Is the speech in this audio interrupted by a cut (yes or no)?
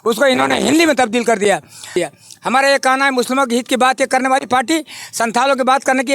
yes